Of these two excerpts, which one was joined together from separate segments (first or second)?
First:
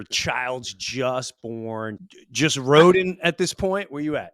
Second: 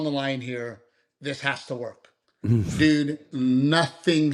first